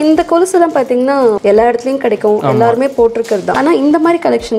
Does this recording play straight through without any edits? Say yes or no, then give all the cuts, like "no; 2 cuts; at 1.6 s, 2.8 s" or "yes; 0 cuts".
no; 2 cuts; at 1.4 s, 3.6 s